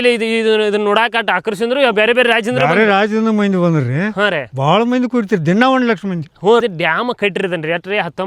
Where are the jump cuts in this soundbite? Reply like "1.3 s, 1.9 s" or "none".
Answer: 6.6 s